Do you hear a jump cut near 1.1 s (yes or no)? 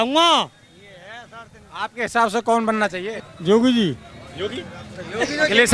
no